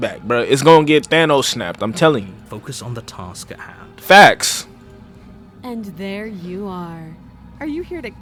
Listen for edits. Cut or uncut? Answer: uncut